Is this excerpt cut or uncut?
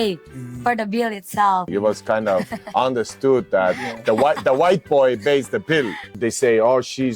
cut